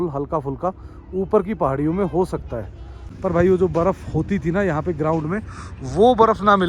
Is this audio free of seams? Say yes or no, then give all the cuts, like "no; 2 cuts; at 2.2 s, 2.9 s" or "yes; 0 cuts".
no; 1 cut; at 3.0 s